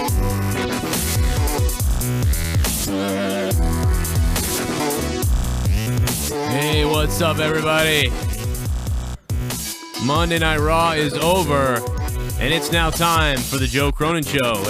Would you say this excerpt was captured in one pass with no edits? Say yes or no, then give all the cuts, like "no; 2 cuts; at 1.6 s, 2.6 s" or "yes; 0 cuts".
no; 1 cut; at 0.9 s